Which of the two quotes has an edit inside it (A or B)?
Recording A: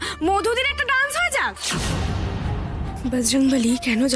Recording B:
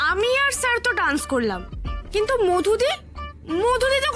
A